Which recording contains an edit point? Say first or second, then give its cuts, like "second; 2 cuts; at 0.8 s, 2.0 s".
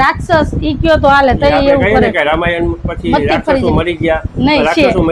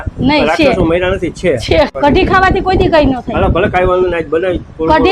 second; 1 cut; at 1.9 s